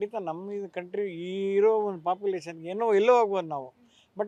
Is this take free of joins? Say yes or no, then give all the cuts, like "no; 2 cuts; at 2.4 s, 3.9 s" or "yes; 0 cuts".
yes; 0 cuts